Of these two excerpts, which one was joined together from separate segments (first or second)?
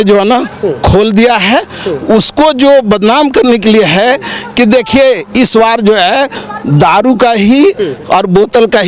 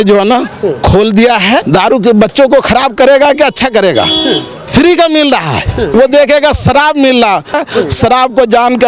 second